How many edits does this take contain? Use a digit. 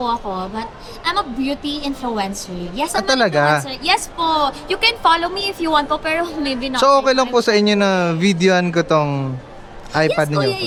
0